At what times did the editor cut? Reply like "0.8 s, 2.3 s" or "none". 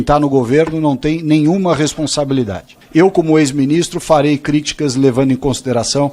2.8 s